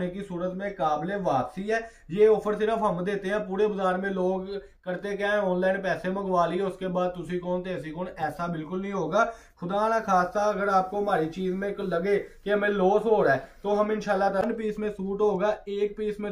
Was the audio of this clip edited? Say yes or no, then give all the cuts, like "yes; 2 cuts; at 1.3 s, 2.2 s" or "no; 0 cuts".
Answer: yes; 1 cut; at 14.4 s